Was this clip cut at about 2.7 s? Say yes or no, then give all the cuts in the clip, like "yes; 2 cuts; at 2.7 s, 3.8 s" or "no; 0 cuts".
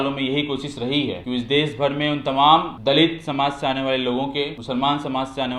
yes; 3 cuts; at 1.2 s, 2.7 s, 4.6 s